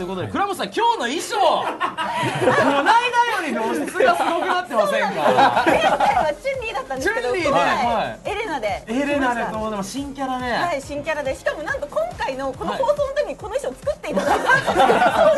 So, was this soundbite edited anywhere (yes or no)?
no